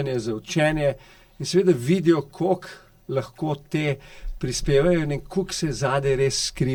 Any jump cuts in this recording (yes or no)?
no